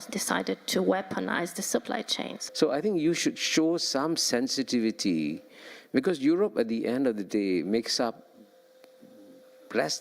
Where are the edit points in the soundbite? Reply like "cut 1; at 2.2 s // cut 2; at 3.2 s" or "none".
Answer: cut 1; at 2.4 s